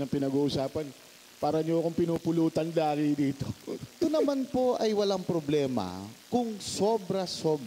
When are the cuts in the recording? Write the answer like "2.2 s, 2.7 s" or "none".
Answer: 4.0 s